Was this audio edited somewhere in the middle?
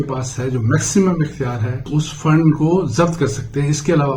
yes; 1 cut; at 1.8 s

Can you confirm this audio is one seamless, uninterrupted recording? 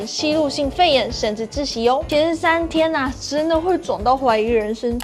no; 1 cut; at 2.1 s

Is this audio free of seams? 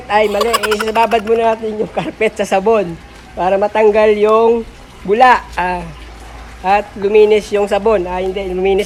yes; 0 cuts

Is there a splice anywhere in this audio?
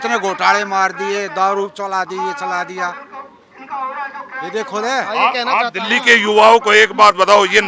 no; 0 cuts

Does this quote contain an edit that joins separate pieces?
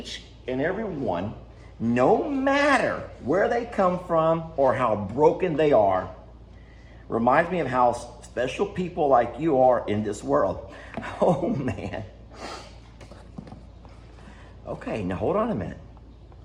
no; 0 cuts

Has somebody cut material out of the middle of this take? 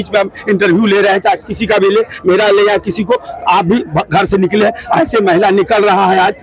no; 0 cuts

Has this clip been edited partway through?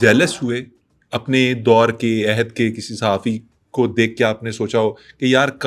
no; 0 cuts

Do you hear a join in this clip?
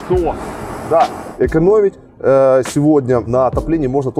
yes; 2 cuts; at 1.2 s, 3.3 s

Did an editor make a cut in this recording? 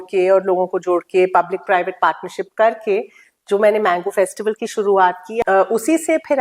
yes; 1 cut; at 5.4 s

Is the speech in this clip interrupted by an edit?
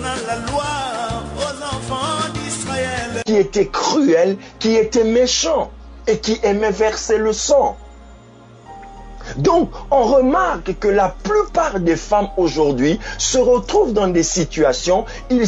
yes; 1 cut; at 3.1 s

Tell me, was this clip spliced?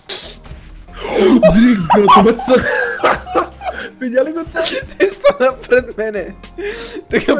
no; 0 cuts

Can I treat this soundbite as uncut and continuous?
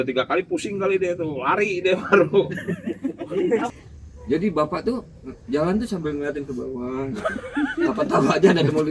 no; 1 cut; at 3.7 s

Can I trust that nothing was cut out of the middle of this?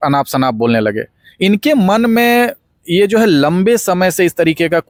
yes; 0 cuts

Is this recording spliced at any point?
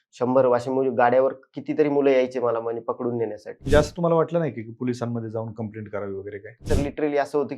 yes; 2 cuts; at 3.6 s, 6.6 s

